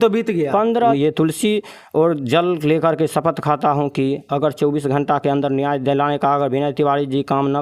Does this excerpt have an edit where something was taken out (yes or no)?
yes